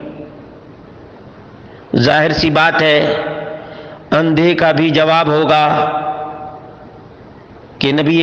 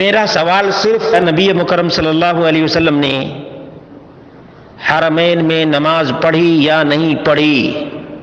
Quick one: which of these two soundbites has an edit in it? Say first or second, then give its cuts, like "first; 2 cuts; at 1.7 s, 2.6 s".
second; 1 cut; at 1.2 s